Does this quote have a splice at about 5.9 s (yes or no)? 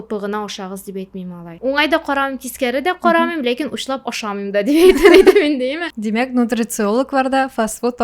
yes